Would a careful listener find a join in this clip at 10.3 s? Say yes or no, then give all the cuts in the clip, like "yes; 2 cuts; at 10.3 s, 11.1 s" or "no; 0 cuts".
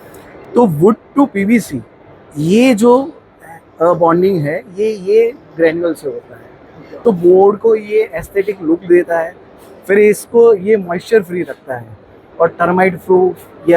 no; 1 cut; at 7.0 s